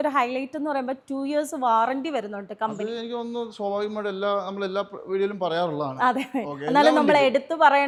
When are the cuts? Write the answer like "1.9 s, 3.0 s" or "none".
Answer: none